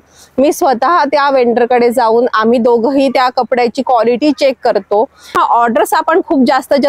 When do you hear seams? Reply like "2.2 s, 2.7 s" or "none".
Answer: 5.4 s